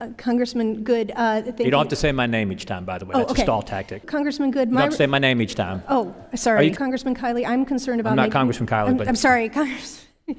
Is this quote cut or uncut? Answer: cut